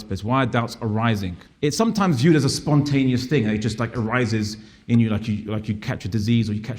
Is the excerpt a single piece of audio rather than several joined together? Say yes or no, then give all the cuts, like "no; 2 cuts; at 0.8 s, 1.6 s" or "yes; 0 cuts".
no; 1 cut; at 1.4 s